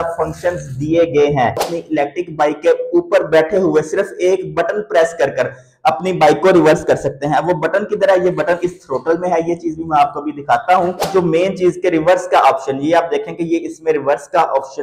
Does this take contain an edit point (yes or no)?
yes